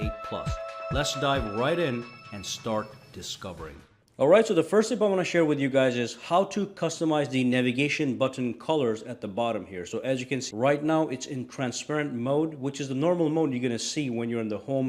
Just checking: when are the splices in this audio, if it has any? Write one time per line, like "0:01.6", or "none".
0:12.1